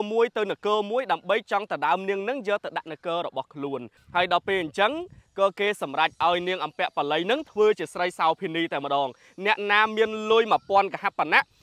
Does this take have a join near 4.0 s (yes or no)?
yes